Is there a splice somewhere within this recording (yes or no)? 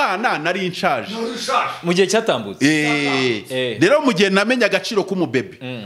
no